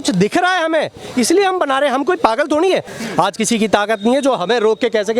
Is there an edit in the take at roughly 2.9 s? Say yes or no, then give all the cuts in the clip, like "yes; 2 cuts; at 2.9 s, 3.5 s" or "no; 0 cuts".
yes; 1 cut; at 2.9 s